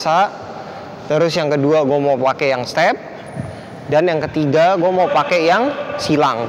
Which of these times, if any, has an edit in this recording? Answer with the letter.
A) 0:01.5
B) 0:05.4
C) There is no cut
C